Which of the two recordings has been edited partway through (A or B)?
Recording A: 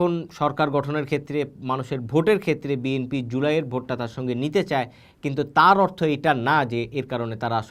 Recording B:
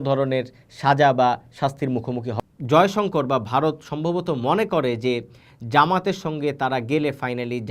B